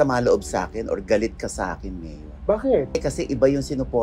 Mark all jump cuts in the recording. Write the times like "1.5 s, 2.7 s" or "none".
3.0 s

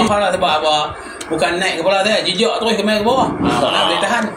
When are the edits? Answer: none

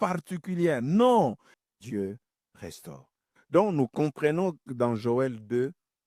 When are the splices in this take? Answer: 1.6 s

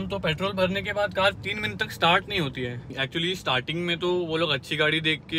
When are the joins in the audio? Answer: 3.0 s

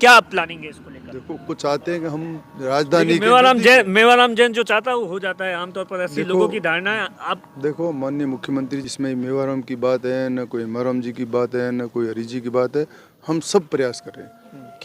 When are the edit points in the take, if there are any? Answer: 1.4 s, 8.8 s

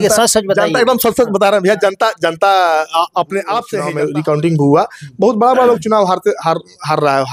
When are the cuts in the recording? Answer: 3.8 s

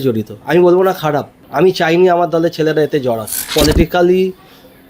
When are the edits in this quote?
1.4 s, 3.5 s

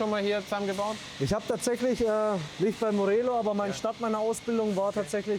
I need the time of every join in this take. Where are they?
2.5 s

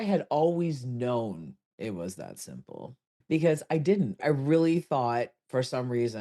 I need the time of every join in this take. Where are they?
3.1 s

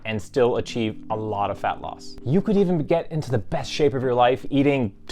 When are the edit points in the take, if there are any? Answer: none

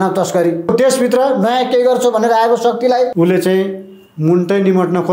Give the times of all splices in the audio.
0.7 s, 3.1 s

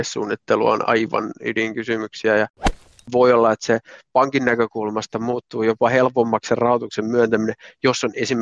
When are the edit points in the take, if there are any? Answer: 2.9 s

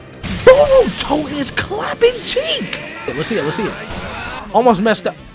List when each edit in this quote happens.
3.1 s

